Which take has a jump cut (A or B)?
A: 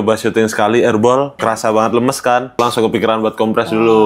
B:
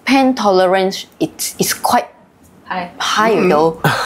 A